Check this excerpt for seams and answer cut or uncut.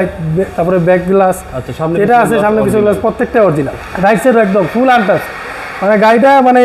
cut